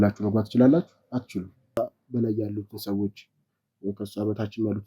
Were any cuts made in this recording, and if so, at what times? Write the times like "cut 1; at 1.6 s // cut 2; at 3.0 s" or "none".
cut 1; at 1.8 s

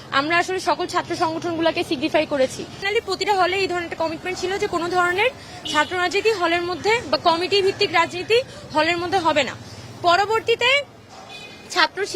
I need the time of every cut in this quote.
cut 1; at 2.8 s

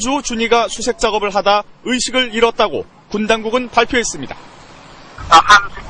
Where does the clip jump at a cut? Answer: none

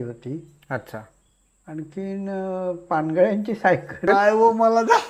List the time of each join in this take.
cut 1; at 4.0 s

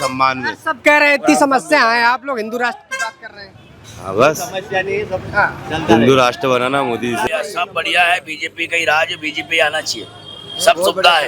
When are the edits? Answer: cut 1; at 7.3 s

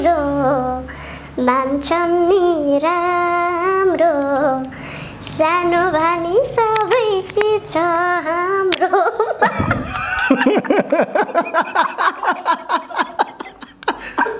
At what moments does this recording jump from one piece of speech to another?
none

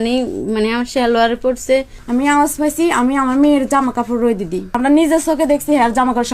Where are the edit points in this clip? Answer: cut 1; at 1.9 s // cut 2; at 4.8 s

